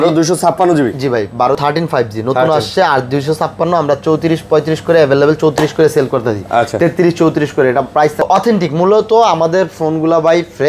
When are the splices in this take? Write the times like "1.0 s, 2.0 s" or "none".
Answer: 1.6 s, 8.2 s